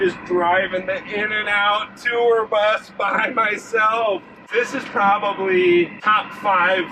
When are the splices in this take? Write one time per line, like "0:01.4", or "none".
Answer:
0:04.4
0:06.0